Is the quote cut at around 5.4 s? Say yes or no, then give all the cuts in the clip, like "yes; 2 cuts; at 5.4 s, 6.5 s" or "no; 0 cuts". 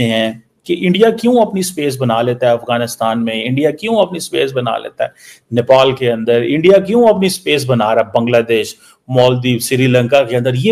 no; 0 cuts